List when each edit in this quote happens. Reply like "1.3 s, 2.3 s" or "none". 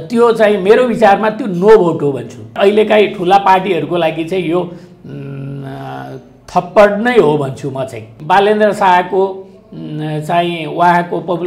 2.6 s, 8.1 s

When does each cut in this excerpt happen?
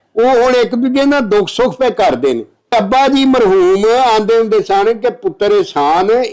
2.7 s

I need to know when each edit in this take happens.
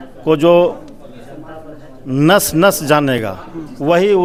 none

